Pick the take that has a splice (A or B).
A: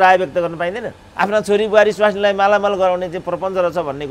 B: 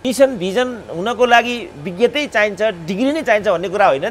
A